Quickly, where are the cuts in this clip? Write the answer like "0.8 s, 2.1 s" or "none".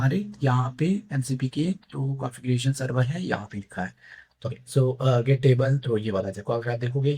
4.5 s